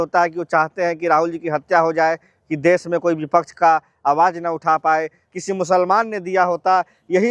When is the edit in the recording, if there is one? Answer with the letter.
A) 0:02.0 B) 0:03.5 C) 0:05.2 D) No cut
C